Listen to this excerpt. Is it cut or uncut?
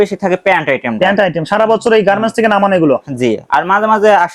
uncut